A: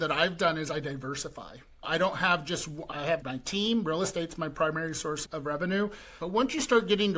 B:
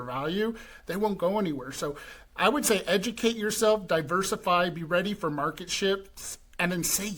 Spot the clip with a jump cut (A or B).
A